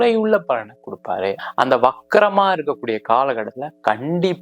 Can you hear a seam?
yes; 1 cut; at 1.4 s

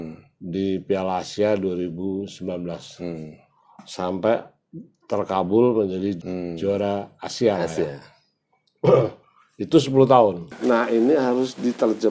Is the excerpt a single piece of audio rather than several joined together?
no; 2 cuts; at 6.2 s, 10.5 s

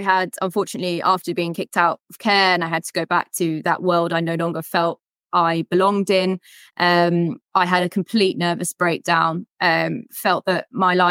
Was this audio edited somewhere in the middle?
no; 0 cuts

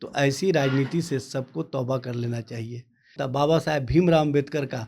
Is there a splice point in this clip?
yes; 1 cut; at 3.2 s

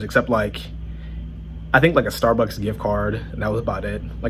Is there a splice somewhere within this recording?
no; 0 cuts

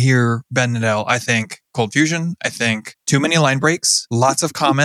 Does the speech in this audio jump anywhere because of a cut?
yes; 2 cuts; at 2.9 s, 3.9 s

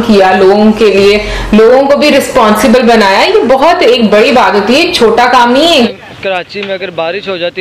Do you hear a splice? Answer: yes; 1 cut; at 5.9 s

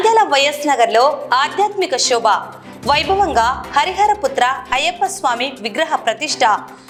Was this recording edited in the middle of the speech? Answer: no; 0 cuts

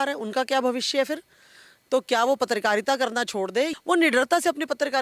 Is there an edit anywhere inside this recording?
yes; 1 cut; at 3.7 s

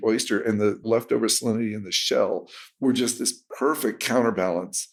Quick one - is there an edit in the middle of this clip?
no; 0 cuts

